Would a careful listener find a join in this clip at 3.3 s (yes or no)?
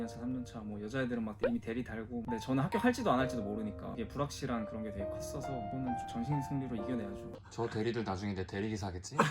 no